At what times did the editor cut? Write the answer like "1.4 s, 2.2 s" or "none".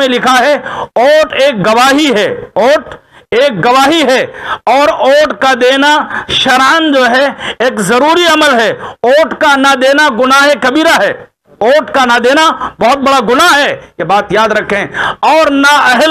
none